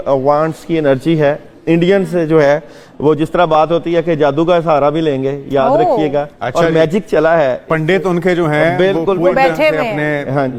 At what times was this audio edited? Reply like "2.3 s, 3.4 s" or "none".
none